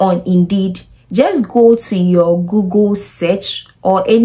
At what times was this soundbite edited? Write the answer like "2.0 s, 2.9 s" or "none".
none